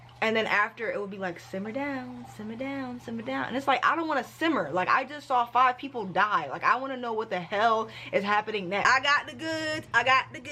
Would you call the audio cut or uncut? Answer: cut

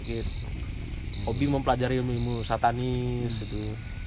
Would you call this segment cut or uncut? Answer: uncut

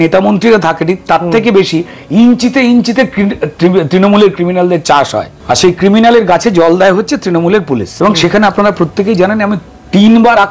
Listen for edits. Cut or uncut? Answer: cut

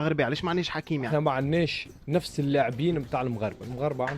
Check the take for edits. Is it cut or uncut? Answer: cut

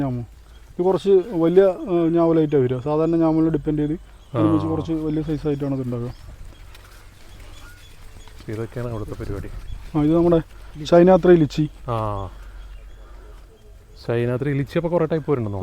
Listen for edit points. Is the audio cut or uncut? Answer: uncut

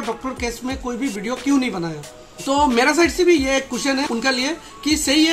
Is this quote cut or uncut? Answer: uncut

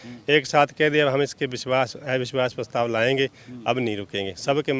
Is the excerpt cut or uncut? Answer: uncut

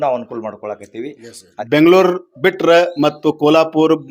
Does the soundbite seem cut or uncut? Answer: cut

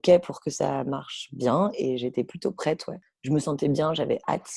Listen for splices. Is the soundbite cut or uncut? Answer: uncut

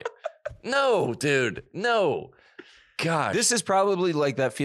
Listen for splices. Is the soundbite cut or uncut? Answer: uncut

